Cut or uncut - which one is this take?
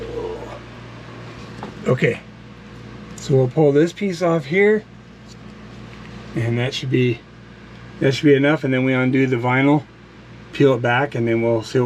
uncut